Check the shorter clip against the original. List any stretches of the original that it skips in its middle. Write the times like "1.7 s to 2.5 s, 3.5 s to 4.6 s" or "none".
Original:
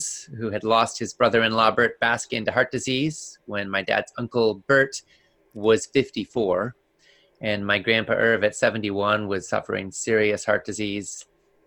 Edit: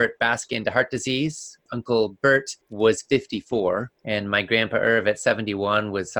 3.5 s to 4.1 s, 5.1 s to 5.4 s, 6.8 s to 7.3 s

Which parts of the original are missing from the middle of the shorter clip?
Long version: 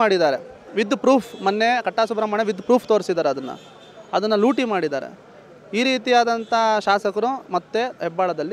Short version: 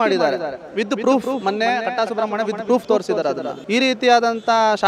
3.5 s to 5.6 s

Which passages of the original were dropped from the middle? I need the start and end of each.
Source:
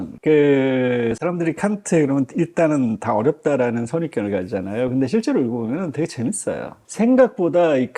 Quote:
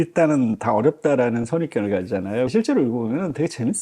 4.9 s to 5.1 s

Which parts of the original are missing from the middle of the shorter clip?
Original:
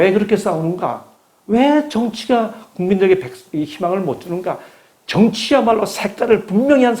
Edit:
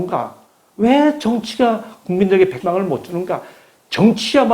3.3 s to 3.7 s

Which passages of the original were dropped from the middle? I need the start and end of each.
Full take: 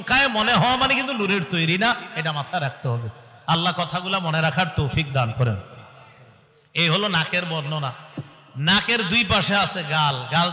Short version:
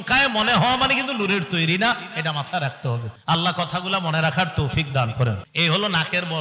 3.1 s to 3.3 s, 5.6 s to 6.6 s

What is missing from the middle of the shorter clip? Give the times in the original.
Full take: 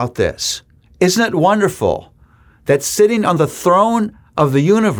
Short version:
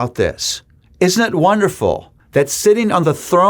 2.1 s to 2.5 s

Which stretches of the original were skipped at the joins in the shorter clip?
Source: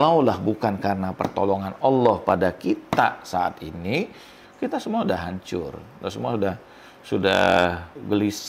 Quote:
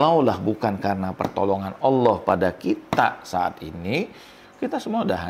none

